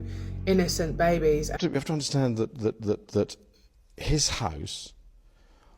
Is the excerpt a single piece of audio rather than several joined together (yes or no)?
no